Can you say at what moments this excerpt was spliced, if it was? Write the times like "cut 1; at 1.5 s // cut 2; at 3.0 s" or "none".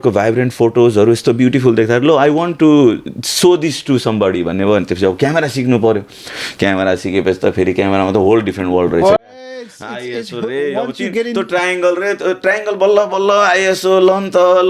none